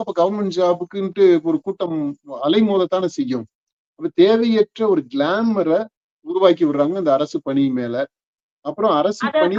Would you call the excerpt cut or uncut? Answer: uncut